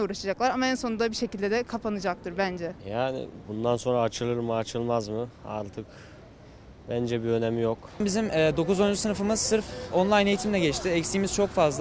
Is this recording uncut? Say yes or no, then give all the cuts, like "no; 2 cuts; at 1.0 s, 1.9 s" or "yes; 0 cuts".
no; 2 cuts; at 2.8 s, 8.0 s